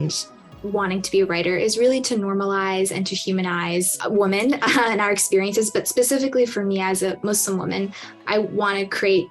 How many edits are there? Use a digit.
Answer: 2